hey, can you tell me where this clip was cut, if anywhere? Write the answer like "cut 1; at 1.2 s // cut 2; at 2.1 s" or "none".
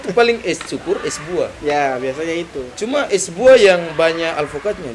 none

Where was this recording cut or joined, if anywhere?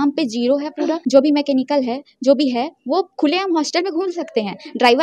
cut 1; at 1.0 s

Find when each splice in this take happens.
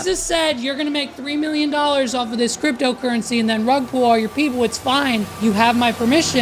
cut 1; at 5.3 s

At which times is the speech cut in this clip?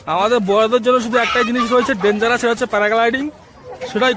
none

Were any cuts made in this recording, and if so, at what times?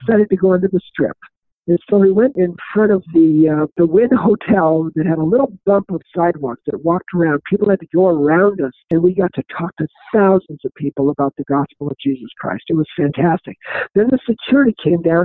cut 1; at 2.4 s // cut 2; at 3.7 s // cut 3; at 8.8 s

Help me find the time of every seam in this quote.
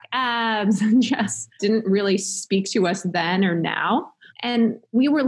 cut 1; at 1.6 s

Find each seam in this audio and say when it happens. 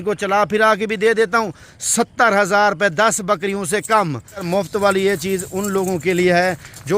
cut 1; at 4.5 s

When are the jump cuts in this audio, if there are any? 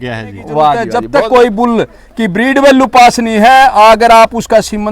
cut 1; at 1.0 s

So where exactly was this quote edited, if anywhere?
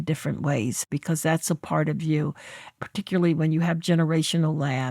cut 1; at 0.9 s // cut 2; at 2.6 s

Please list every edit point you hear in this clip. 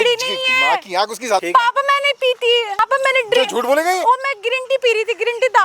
cut 1; at 1.4 s // cut 2; at 2.8 s

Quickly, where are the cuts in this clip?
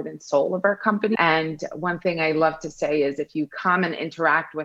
cut 1; at 1.2 s

